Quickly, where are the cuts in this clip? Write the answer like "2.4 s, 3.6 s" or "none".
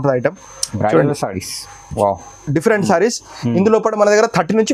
none